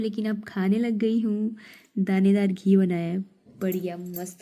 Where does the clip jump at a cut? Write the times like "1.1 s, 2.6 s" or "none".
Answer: none